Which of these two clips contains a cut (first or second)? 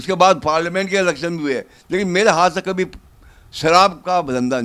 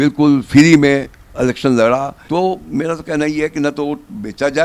second